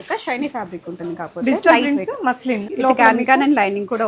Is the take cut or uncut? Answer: cut